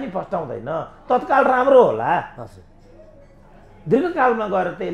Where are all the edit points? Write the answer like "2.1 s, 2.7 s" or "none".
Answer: none